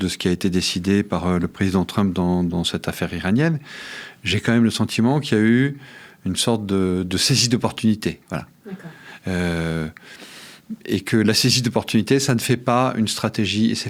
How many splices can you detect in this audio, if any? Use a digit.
0